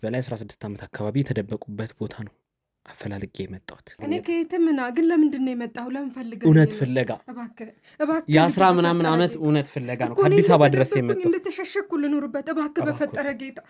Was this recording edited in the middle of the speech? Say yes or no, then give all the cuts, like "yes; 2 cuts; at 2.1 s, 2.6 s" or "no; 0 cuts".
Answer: yes; 1 cut; at 4.0 s